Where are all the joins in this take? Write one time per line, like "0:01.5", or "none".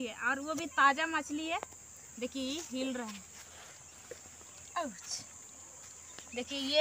none